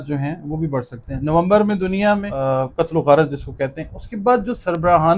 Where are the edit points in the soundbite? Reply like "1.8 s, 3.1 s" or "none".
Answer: 2.3 s

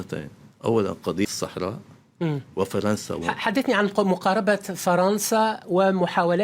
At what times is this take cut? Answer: 1.3 s

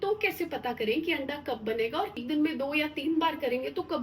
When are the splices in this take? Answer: 2.2 s

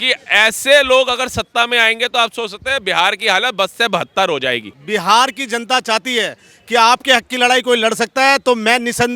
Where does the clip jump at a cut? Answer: 4.7 s

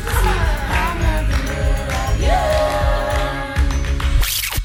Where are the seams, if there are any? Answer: none

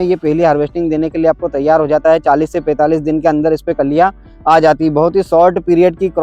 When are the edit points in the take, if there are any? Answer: none

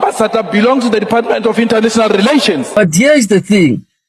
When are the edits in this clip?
2.7 s

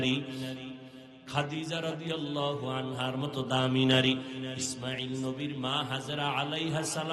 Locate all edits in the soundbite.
none

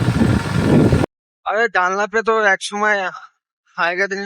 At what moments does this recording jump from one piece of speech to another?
1.4 s

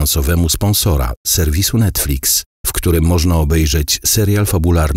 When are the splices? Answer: none

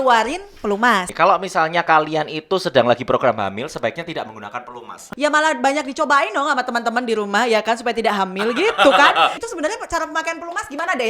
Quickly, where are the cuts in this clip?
1.1 s, 5.1 s, 9.4 s

